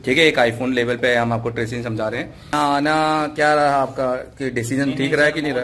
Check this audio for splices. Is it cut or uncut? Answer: cut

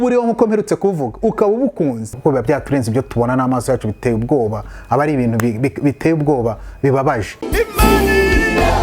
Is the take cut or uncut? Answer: cut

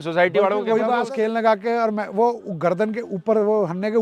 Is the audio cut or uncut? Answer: cut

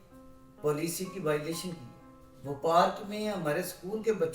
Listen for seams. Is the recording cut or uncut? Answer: uncut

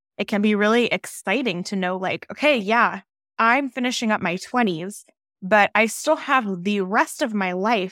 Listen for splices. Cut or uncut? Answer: uncut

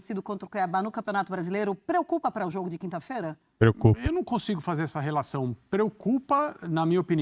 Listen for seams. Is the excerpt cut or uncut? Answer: uncut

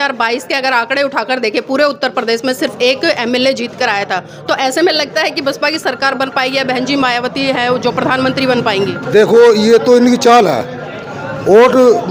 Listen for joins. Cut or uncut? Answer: uncut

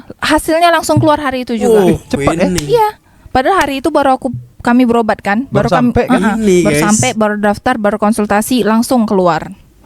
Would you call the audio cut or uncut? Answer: uncut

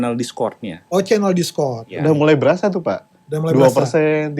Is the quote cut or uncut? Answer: cut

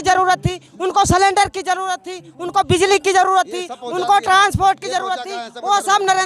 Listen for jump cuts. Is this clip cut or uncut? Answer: uncut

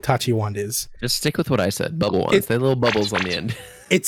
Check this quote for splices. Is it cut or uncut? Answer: uncut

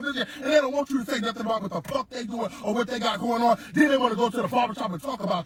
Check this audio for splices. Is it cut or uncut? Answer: uncut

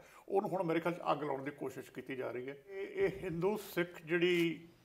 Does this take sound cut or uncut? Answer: cut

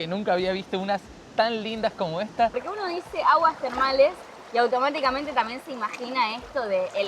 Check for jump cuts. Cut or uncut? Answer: cut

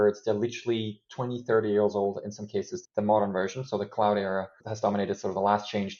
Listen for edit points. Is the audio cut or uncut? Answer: uncut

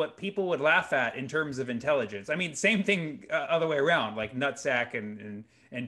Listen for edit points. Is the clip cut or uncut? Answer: uncut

